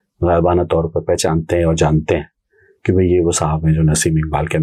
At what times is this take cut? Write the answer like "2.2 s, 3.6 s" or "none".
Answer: none